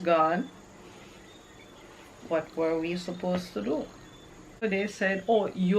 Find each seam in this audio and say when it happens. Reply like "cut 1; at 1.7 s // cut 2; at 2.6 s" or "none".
cut 1; at 4.6 s